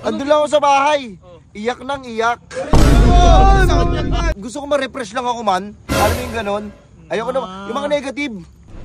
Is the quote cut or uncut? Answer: cut